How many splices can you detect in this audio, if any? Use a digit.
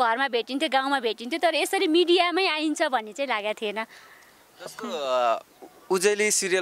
0